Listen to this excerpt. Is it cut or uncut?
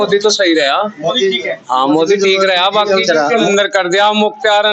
cut